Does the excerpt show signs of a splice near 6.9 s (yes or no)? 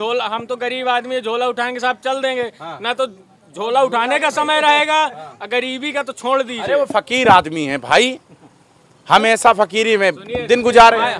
no